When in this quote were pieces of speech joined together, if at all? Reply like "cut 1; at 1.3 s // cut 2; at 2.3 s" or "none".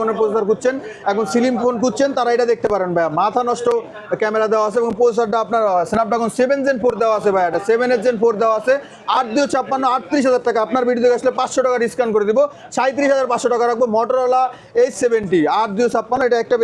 none